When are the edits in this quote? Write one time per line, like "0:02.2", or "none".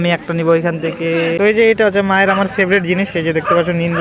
0:01.3